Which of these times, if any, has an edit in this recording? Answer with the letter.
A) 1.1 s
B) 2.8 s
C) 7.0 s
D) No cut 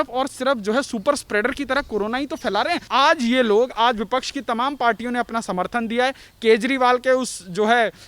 B